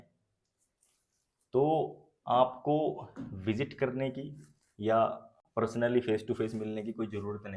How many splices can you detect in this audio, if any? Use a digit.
0